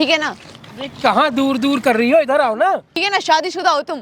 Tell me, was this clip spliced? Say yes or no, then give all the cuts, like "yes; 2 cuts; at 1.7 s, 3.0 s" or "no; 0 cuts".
yes; 1 cut; at 3.0 s